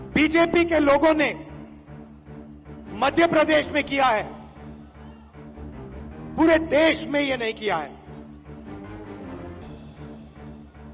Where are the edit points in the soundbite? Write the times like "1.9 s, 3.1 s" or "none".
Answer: 1.4 s, 3.0 s, 4.4 s, 6.4 s, 8.1 s